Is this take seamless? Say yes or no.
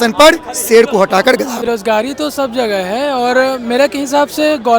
no